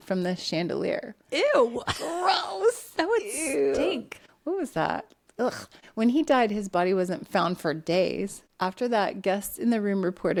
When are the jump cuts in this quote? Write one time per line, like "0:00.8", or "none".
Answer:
none